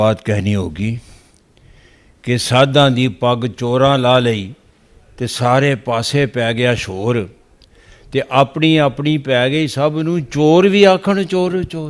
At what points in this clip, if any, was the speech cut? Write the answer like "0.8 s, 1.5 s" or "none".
none

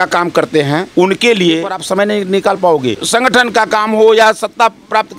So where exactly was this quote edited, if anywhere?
0.9 s, 1.8 s, 3.0 s

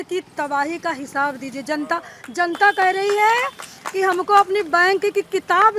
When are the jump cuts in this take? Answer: none

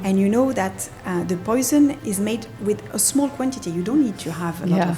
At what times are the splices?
2.0 s

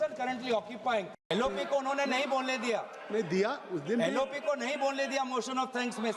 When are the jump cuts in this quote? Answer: 1.2 s

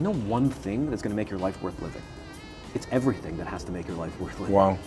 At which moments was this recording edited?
none

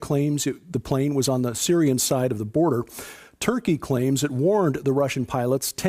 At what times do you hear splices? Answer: 1.5 s

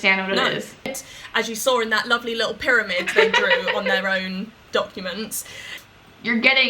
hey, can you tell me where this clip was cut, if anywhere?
1.0 s, 5.7 s

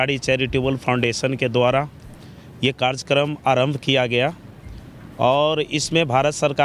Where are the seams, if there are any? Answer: none

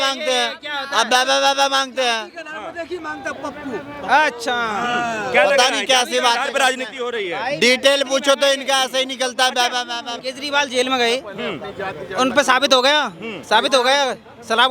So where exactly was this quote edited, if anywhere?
none

